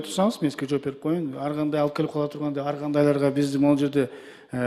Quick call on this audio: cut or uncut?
uncut